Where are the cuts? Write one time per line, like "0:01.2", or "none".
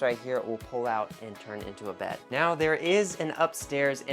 0:02.2